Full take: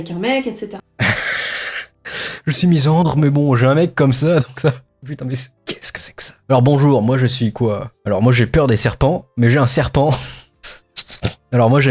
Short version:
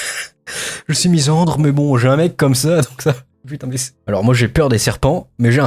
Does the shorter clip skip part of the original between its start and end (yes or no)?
yes